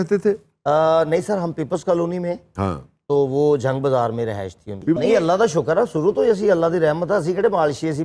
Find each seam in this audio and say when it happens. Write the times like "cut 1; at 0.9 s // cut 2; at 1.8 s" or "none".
cut 1; at 5.0 s